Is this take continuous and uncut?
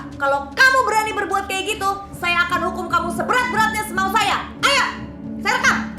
yes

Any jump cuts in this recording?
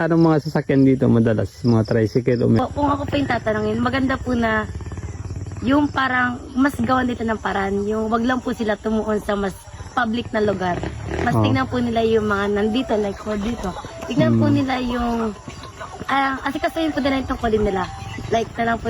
yes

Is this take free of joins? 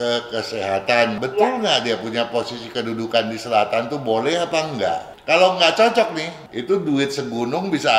no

